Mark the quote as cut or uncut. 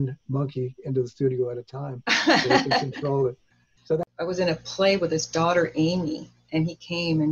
cut